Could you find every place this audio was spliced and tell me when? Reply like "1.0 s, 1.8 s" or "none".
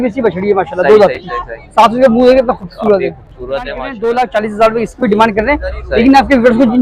3.9 s